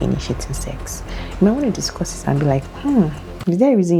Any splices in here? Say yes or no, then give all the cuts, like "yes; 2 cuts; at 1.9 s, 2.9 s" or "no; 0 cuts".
no; 0 cuts